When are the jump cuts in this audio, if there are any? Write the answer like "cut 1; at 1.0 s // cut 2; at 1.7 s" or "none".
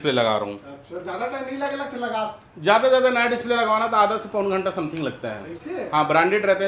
none